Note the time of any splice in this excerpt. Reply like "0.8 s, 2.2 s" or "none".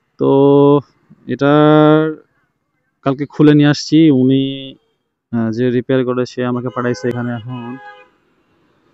7.2 s